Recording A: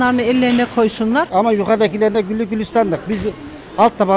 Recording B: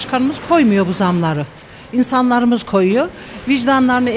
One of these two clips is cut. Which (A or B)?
A